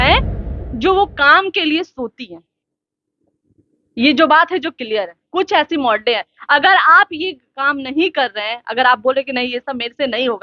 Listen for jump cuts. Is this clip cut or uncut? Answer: uncut